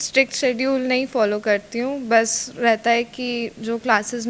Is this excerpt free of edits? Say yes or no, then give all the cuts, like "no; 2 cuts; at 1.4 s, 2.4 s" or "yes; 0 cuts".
yes; 0 cuts